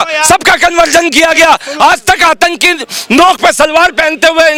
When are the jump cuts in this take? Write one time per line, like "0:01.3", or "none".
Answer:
none